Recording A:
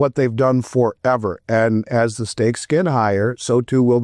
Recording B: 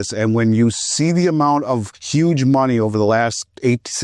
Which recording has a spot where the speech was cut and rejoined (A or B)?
B